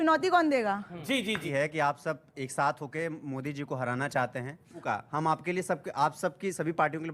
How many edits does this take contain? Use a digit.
2